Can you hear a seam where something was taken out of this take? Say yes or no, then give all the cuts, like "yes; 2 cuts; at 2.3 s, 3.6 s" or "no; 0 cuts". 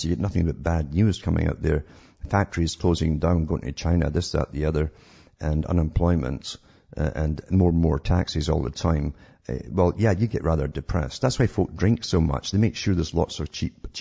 yes; 1 cut; at 9.7 s